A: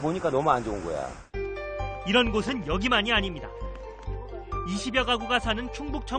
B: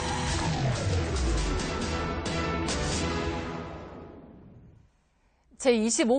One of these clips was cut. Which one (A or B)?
B